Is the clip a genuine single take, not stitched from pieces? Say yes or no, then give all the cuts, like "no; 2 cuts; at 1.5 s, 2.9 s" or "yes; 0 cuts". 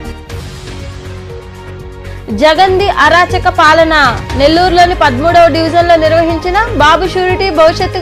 yes; 0 cuts